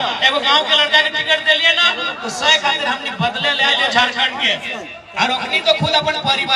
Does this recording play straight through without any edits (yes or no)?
yes